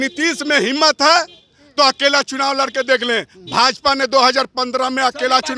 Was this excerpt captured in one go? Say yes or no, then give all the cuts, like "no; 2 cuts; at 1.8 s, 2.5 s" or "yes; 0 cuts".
yes; 0 cuts